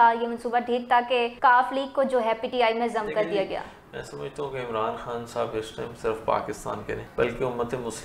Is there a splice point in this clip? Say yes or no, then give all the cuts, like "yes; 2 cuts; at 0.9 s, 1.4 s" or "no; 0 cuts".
yes; 2 cuts; at 1.3 s, 7.1 s